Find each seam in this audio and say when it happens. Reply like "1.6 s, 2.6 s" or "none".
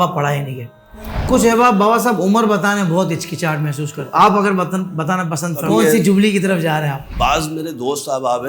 1.2 s, 3.9 s, 5.6 s, 7.0 s